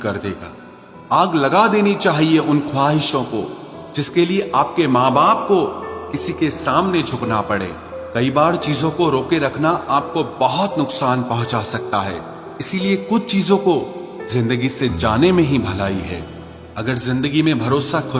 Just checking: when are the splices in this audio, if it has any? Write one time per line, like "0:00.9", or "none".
none